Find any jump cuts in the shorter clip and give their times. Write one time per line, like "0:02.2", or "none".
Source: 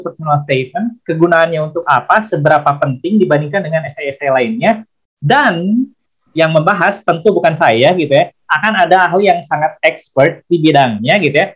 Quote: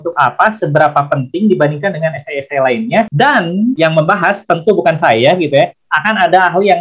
0:03.4